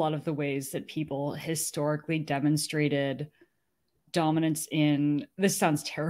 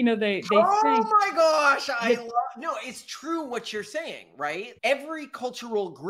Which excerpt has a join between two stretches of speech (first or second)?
second